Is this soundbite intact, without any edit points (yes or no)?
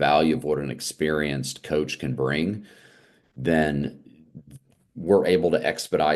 yes